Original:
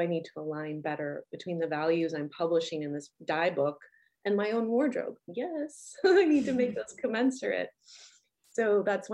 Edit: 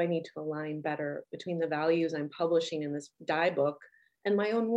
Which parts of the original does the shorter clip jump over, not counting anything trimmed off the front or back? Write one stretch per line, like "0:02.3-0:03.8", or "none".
none